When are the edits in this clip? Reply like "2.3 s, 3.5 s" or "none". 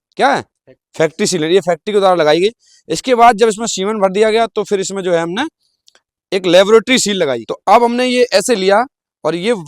7.5 s